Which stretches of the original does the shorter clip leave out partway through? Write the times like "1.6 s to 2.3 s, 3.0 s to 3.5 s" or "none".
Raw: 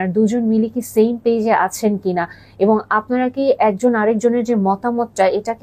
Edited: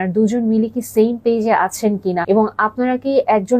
2.2 s to 2.5 s